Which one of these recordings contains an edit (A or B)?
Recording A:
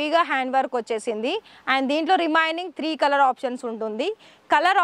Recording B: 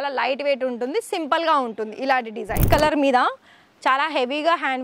B